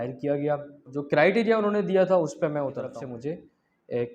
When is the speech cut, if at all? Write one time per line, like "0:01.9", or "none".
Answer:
0:01.0
0:02.9